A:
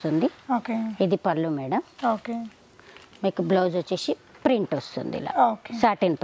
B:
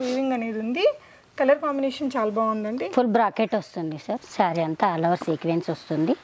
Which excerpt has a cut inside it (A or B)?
B